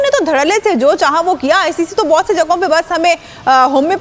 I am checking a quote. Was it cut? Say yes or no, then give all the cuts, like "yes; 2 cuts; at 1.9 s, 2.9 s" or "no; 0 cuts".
no; 0 cuts